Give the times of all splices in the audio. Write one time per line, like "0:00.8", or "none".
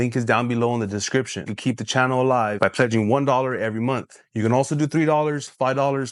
none